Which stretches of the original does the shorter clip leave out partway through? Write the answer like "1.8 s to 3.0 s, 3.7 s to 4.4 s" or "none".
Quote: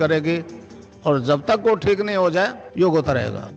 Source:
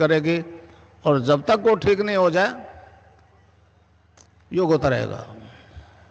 2.6 s to 4.4 s